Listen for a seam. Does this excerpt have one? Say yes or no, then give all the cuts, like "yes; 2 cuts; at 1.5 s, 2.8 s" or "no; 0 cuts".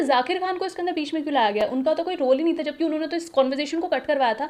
no; 0 cuts